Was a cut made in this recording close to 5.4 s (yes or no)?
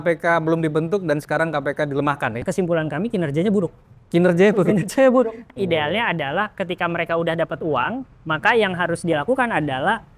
yes